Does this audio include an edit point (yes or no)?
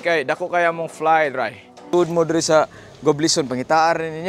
yes